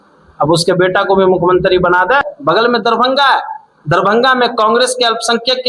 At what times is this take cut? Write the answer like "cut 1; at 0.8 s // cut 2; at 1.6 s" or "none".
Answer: cut 1; at 2.2 s